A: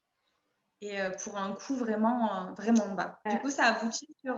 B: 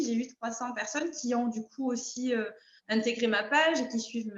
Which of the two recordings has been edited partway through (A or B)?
A